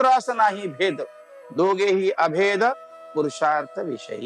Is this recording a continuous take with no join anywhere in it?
yes; 0 cuts

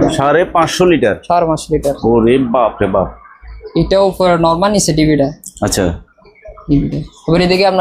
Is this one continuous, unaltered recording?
yes; 0 cuts

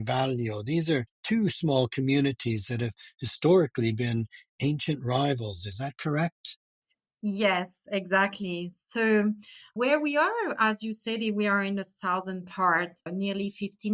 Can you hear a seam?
no; 0 cuts

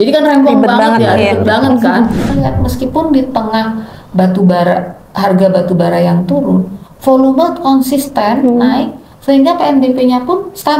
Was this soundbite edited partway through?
yes; 1 cut; at 2.3 s

